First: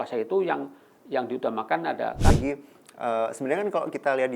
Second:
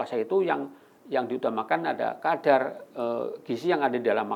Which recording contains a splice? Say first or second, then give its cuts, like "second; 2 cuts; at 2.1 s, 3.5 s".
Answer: first; 1 cut; at 2.3 s